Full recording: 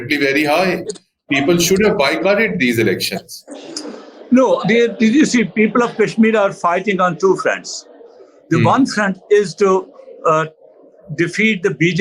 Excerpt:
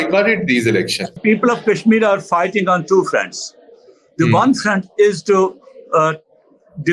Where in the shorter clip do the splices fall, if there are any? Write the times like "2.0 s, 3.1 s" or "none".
1.2 s